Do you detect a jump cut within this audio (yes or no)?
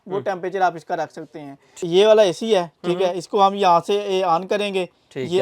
yes